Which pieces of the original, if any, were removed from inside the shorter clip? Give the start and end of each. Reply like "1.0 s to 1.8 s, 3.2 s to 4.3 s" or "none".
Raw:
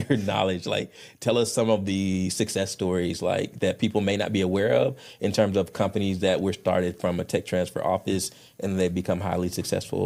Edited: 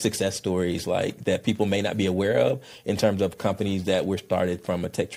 none